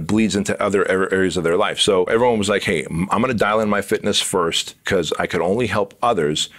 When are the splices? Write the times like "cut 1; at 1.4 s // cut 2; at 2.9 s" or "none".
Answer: cut 1; at 2.1 s // cut 2; at 4.7 s